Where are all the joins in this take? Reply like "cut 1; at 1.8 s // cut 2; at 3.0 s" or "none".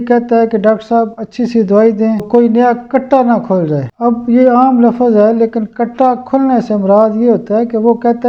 cut 1; at 2.3 s // cut 2; at 3.9 s